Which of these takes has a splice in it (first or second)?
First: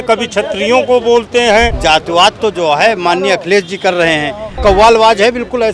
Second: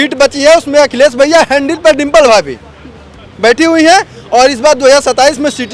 first